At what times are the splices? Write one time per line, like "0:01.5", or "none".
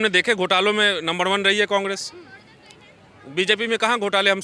none